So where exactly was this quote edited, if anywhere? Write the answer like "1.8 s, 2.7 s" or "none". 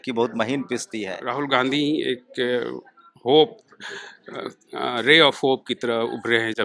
1.2 s